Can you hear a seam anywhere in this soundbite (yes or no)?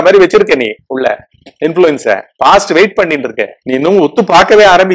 yes